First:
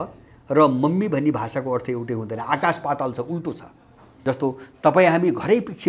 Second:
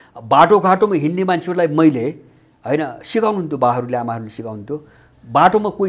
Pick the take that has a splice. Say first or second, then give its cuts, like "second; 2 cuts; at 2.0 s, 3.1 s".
first; 1 cut; at 4.1 s